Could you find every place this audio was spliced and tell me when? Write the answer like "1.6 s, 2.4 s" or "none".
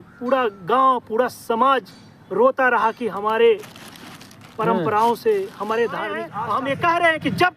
6.3 s